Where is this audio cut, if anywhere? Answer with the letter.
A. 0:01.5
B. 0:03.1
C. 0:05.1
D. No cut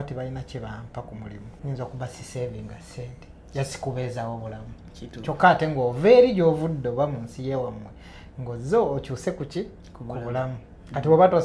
A